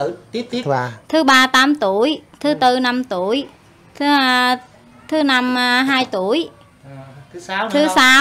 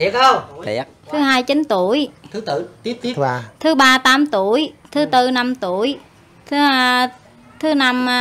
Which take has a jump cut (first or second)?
second